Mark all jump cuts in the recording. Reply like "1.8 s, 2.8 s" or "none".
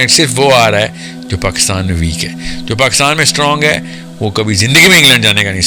none